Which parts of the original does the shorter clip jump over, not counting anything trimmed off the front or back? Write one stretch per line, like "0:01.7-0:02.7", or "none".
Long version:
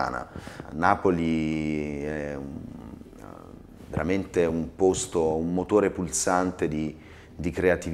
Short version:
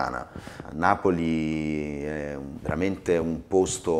0:02.5-0:03.8